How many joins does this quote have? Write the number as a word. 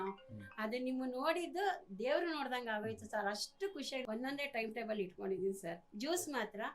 one